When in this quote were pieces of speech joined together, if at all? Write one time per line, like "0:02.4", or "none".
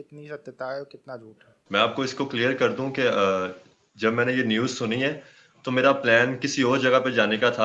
none